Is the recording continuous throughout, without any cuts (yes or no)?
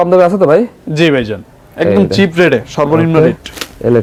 yes